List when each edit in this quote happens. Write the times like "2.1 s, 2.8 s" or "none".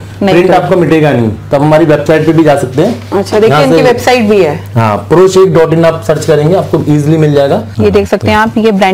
1.4 s, 7.7 s